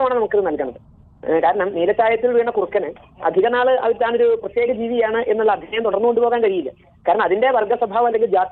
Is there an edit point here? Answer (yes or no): no